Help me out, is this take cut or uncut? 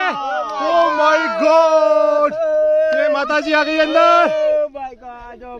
uncut